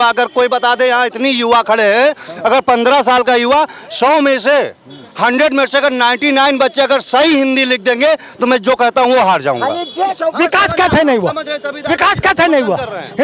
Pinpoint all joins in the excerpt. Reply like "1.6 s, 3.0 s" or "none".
10.2 s